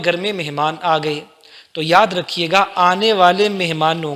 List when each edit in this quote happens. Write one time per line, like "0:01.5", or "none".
none